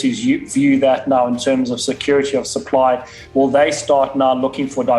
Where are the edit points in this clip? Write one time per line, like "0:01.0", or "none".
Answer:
none